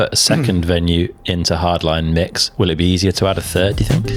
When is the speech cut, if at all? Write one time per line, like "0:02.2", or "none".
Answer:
none